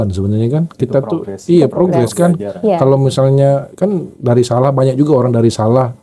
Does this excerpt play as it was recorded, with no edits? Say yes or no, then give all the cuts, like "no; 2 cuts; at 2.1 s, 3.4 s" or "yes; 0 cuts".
yes; 0 cuts